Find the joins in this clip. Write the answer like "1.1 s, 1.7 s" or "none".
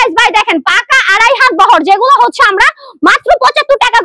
none